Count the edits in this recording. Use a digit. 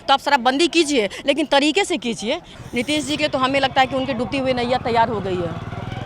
1